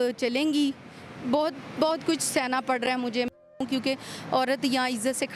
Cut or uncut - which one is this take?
cut